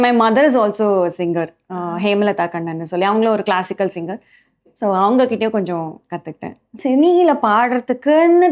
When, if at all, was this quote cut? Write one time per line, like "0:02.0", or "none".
0:06.8